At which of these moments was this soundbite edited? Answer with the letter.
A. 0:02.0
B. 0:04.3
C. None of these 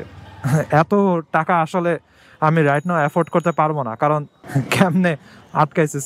B